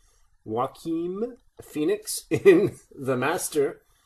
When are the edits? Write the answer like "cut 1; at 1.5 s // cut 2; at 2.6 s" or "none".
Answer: none